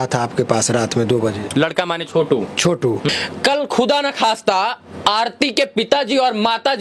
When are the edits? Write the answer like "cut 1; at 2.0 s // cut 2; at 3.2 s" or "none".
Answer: cut 1; at 3.1 s